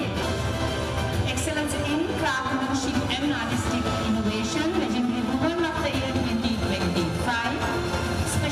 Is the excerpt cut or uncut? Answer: uncut